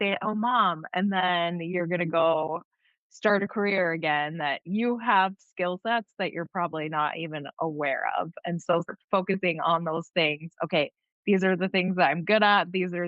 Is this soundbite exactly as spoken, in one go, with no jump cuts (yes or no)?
yes